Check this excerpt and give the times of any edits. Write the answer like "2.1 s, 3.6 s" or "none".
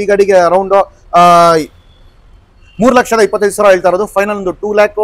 none